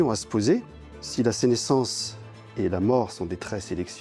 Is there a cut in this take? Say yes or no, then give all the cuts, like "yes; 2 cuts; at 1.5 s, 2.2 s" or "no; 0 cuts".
no; 0 cuts